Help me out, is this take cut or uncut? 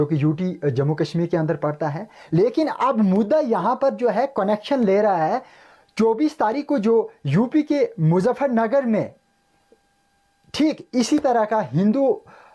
uncut